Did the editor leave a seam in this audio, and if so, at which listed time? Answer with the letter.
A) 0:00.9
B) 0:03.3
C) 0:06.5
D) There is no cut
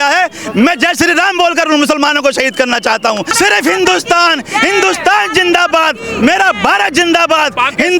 B